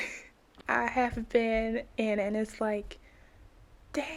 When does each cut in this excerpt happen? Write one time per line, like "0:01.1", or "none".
none